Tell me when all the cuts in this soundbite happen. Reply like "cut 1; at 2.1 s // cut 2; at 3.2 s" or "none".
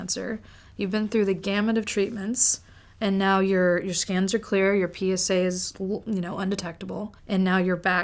cut 1; at 7.1 s